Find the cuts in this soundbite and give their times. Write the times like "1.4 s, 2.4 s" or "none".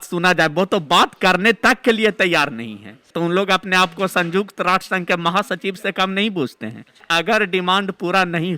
3.1 s, 7.0 s